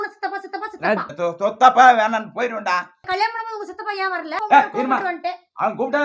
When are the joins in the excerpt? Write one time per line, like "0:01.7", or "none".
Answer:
0:01.1
0:02.9
0:04.3

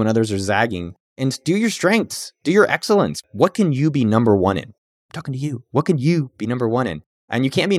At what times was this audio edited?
0:03.2

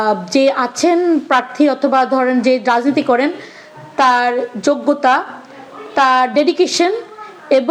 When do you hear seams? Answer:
none

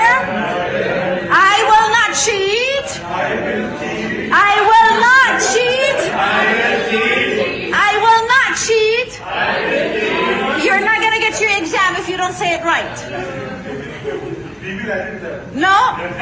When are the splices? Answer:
none

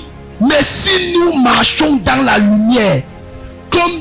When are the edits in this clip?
none

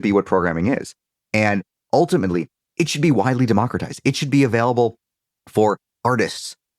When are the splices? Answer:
0:01.8

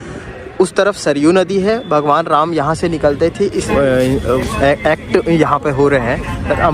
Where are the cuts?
0:03.7

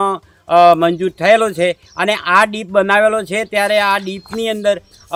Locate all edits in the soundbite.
none

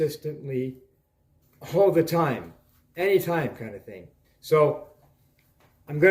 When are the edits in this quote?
0:04.3

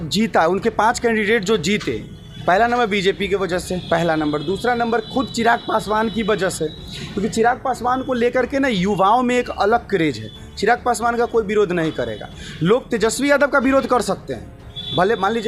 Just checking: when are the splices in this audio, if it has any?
none

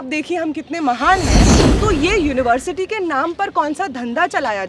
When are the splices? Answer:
0:01.5

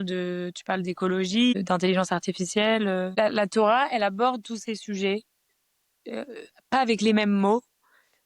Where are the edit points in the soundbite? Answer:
0:01.5
0:03.1

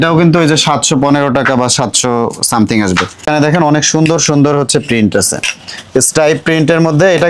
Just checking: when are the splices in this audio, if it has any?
none

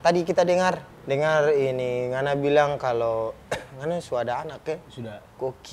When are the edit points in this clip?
0:00.9

